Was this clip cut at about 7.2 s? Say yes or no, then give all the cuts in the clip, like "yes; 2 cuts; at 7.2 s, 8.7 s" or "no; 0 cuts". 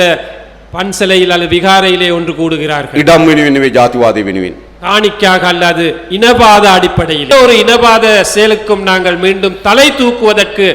yes; 1 cut; at 7.2 s